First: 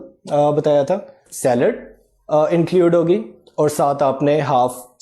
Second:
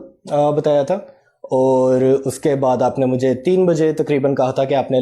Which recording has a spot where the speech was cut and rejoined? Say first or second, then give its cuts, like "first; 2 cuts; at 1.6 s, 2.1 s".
first; 1 cut; at 1.2 s